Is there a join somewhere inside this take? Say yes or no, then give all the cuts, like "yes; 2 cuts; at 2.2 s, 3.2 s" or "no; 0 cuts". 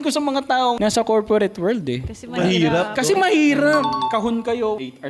no; 0 cuts